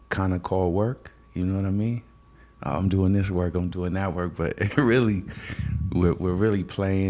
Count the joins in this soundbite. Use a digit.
0